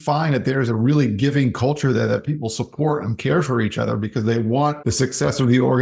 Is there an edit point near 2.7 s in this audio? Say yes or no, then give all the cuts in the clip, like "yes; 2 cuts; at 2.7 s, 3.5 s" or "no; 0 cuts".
no; 1 cut; at 4.8 s